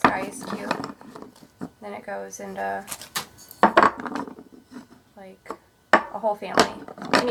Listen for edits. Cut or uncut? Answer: uncut